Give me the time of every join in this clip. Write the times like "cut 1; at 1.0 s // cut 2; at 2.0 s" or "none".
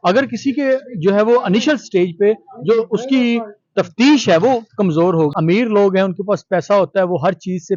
cut 1; at 5.3 s